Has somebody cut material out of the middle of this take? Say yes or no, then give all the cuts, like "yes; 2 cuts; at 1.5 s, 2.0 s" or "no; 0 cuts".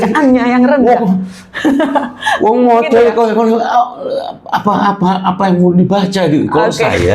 no; 0 cuts